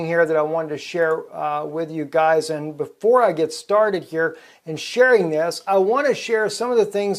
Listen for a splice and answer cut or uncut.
uncut